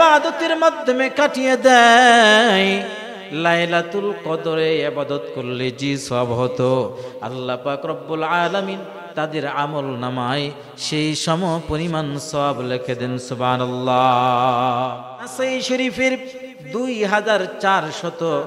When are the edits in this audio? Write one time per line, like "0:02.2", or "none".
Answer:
0:15.4